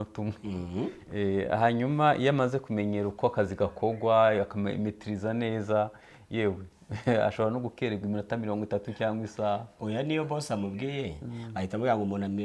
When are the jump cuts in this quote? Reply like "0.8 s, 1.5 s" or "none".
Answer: none